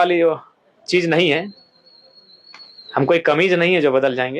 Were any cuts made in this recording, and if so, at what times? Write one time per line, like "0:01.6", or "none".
none

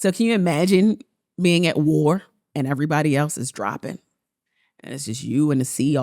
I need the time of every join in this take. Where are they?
0:02.4

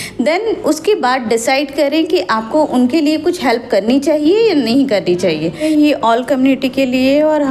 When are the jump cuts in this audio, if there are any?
0:05.6

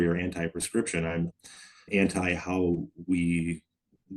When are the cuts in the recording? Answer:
0:01.9

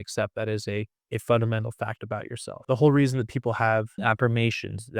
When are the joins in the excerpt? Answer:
0:01.0
0:02.6
0:03.9

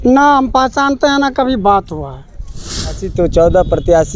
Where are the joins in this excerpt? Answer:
0:03.1

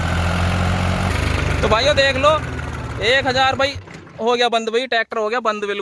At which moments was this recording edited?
0:01.1

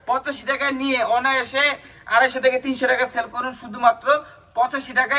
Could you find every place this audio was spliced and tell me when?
none

